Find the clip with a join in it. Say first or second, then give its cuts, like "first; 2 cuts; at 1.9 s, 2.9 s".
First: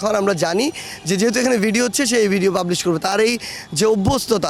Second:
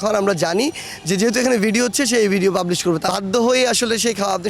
second; 1 cut; at 3.1 s